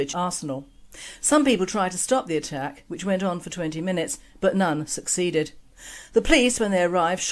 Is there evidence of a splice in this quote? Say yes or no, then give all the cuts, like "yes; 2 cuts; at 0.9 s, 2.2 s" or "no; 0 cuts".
no; 0 cuts